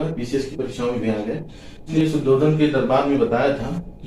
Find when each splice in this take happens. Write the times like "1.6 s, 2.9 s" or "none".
1.9 s